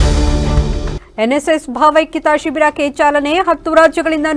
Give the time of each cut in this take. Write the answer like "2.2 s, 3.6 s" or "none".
none